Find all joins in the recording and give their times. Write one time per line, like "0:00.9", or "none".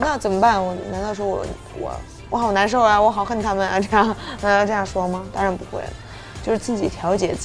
none